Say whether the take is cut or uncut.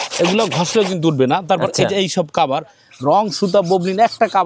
uncut